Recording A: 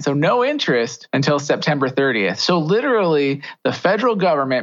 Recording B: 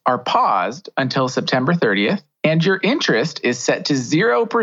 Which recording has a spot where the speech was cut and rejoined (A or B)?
A